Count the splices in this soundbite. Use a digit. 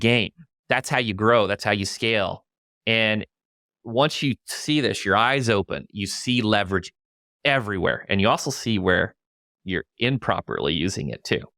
0